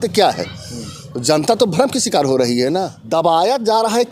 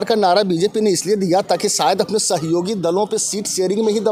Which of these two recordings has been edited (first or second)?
first